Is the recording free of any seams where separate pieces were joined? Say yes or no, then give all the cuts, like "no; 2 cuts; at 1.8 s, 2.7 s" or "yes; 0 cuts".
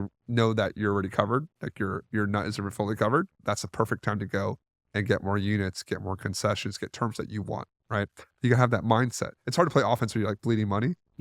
no; 2 cuts; at 3.4 s, 9.4 s